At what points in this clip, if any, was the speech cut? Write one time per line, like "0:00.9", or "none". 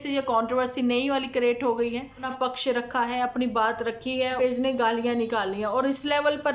0:02.2
0:04.4